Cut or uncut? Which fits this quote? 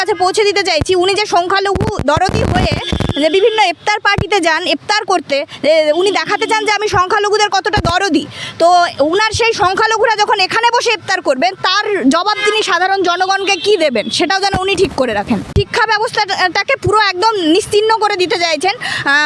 uncut